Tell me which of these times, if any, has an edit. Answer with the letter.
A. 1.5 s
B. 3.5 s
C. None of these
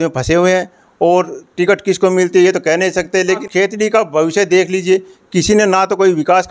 B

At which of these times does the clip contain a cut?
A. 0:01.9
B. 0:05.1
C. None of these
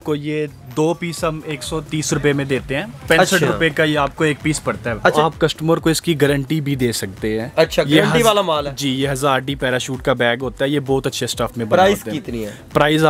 B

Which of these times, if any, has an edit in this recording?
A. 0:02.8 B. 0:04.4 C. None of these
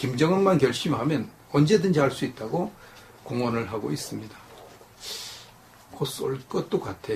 B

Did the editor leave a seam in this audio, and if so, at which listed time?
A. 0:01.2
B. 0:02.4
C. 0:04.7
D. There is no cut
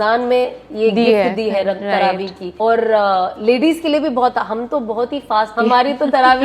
D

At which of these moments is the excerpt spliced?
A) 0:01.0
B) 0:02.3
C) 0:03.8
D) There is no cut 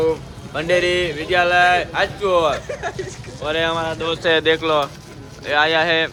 D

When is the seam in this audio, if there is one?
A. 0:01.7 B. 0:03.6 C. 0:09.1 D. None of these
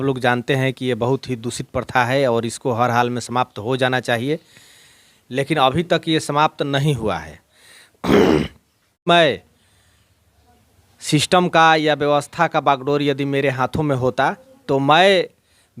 C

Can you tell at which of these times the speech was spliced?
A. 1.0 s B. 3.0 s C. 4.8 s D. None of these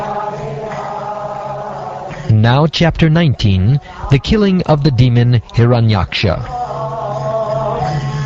D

